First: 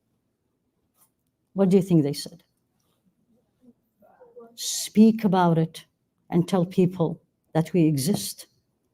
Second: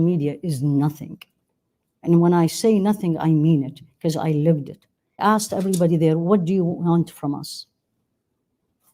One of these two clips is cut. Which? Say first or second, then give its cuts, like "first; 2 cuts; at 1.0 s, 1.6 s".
second; 1 cut; at 5.2 s